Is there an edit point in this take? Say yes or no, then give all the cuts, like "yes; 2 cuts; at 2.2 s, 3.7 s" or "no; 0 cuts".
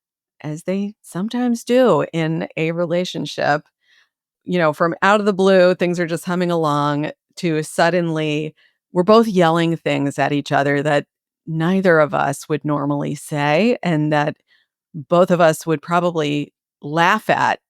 yes; 1 cut; at 4.3 s